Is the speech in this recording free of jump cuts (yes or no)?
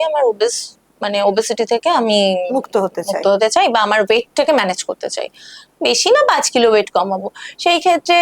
yes